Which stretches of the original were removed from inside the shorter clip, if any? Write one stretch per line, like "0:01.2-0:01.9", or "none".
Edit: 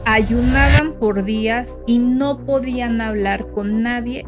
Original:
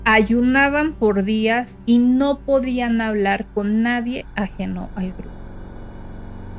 none